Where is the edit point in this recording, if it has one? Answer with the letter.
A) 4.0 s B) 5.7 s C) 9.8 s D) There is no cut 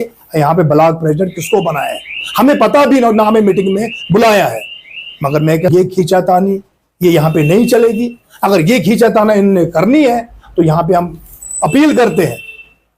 B